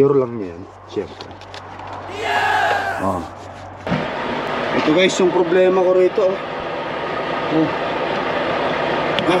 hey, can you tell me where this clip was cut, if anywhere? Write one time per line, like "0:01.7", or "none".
0:03.9

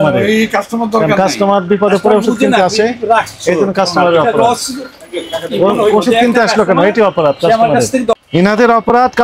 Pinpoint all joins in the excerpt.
0:08.2

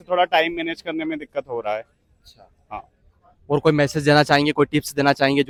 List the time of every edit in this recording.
none

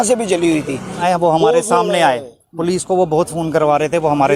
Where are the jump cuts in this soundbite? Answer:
0:01.0

